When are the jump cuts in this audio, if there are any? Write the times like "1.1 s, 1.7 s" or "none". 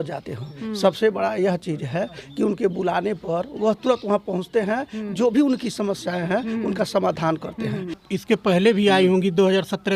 8.0 s